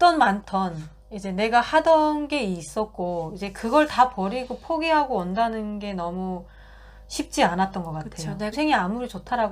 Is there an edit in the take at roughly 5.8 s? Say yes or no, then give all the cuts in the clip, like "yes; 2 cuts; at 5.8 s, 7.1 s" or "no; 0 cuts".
no; 1 cut; at 8.5 s